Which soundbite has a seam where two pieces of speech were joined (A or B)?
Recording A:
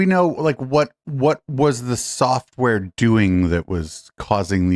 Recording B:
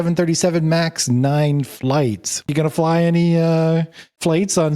B